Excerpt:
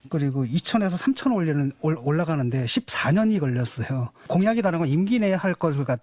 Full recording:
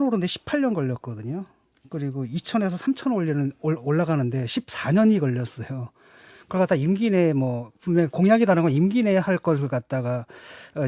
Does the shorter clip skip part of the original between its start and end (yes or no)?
yes